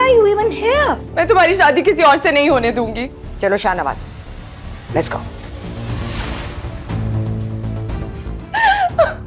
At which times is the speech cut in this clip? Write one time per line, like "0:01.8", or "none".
0:01.1
0:03.2